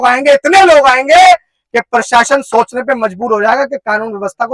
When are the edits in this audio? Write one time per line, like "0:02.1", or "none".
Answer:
none